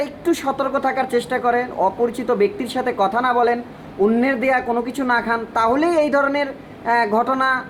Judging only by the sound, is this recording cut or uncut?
uncut